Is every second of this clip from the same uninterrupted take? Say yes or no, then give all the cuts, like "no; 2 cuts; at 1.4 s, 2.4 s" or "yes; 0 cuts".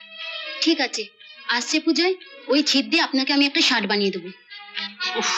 yes; 0 cuts